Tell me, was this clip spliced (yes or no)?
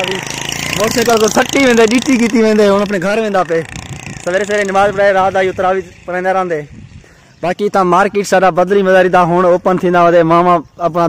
no